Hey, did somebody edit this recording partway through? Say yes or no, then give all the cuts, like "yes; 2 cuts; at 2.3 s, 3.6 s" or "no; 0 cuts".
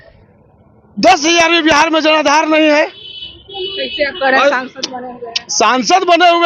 no; 0 cuts